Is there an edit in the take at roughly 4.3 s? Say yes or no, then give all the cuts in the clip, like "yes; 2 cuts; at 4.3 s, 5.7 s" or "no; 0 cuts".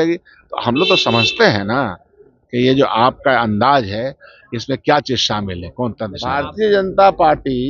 no; 1 cut; at 6.2 s